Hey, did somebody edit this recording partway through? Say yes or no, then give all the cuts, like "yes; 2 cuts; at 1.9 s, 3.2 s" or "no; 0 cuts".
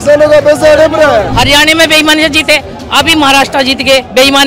yes; 1 cut; at 1.3 s